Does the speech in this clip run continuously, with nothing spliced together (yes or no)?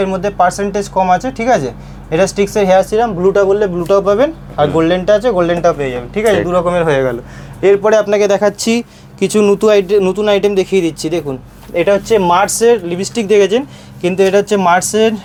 yes